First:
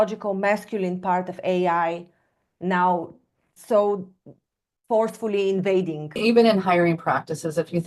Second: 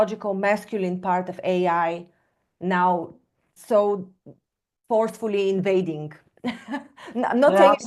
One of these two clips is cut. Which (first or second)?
first